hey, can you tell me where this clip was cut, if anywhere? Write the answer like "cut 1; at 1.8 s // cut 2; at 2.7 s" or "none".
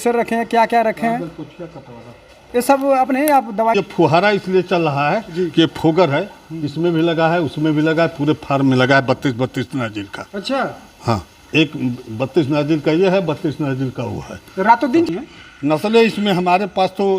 cut 1; at 3.7 s // cut 2; at 15.1 s